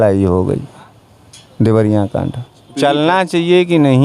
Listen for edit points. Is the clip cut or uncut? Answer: cut